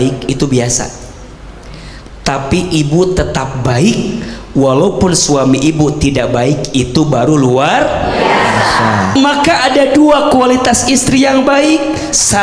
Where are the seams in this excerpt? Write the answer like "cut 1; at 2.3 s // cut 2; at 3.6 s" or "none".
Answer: cut 1; at 9.1 s